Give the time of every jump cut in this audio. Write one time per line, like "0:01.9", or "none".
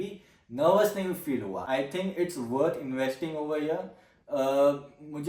0:01.6